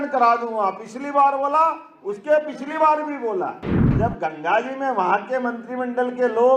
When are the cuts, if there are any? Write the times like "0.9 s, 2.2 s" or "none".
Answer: 3.9 s